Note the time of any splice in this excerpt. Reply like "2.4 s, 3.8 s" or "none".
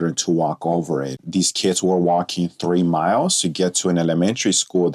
1.2 s